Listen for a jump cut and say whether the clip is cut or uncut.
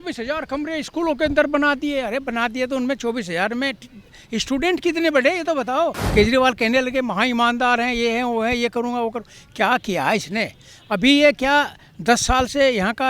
cut